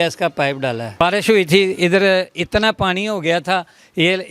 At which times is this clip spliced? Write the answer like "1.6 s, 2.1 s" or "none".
1.0 s